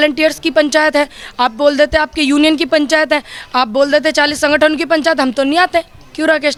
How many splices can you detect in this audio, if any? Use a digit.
0